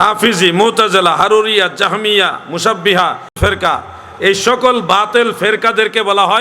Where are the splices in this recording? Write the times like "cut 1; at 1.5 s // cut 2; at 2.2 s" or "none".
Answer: none